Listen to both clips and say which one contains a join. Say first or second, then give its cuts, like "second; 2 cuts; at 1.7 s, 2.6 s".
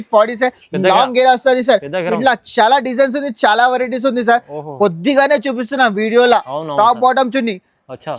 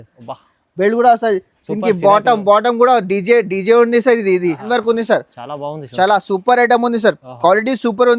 second; 1 cut; at 4.6 s